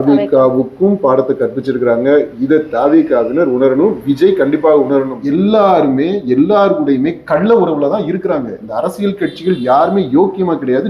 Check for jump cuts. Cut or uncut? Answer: cut